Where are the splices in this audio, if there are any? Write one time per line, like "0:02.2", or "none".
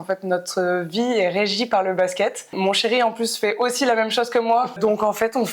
0:02.5
0:04.8